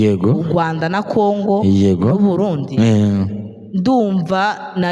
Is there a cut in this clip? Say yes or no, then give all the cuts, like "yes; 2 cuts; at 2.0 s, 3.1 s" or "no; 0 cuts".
no; 0 cuts